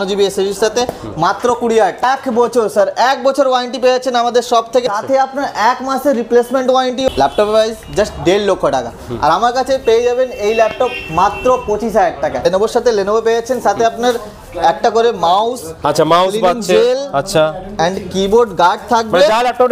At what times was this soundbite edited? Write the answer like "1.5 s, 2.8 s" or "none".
2.0 s, 4.8 s, 7.1 s, 12.4 s